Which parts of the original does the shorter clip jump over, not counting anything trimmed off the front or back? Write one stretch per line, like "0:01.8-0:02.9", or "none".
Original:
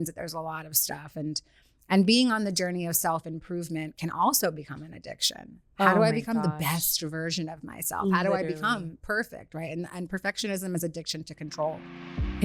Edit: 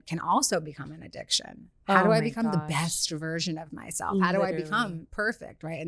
none